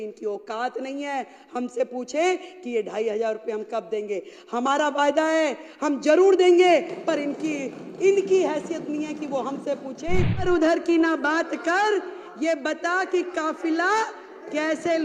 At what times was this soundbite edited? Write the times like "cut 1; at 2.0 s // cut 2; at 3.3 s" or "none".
cut 1; at 10.5 s